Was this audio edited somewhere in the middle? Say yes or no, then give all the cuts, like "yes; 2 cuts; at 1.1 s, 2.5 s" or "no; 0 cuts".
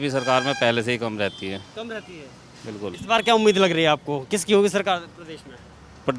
no; 0 cuts